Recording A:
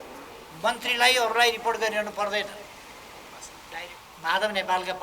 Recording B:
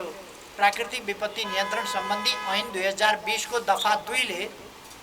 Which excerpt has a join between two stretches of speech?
A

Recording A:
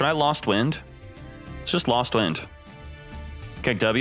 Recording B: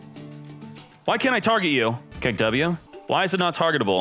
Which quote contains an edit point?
B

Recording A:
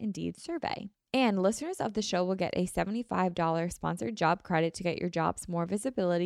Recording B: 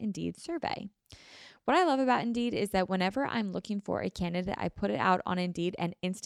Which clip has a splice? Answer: A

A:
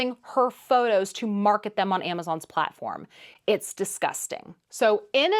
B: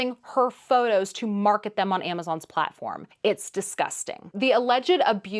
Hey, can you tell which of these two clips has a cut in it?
B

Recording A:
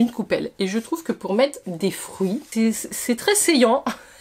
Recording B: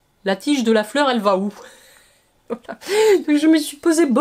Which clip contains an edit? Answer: A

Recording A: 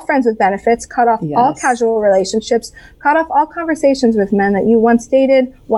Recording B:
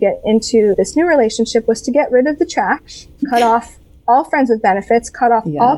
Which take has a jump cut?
B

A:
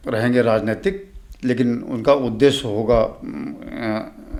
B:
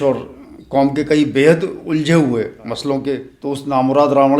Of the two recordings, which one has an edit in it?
B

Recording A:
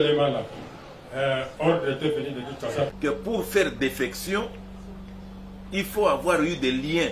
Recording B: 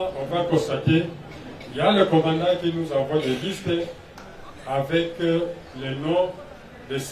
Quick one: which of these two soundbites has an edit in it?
A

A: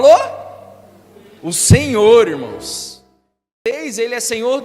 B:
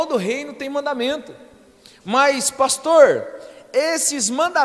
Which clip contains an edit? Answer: A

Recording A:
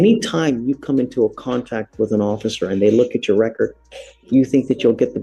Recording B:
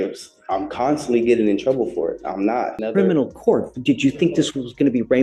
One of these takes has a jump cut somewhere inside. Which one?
B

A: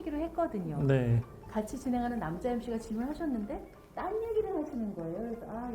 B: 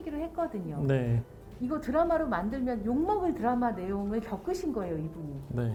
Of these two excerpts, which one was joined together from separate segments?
A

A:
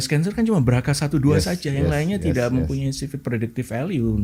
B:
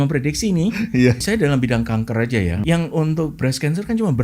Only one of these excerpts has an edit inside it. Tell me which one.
B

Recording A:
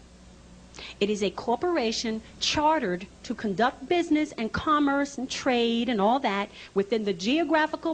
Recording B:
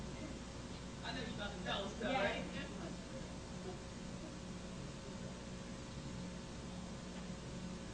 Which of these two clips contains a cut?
B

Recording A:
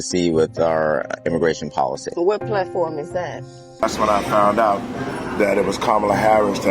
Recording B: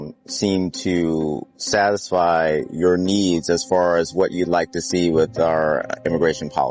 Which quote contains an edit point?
A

